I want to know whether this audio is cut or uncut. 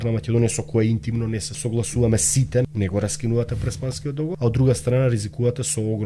cut